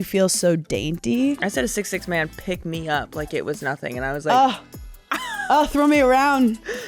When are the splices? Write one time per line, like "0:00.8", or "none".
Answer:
0:01.4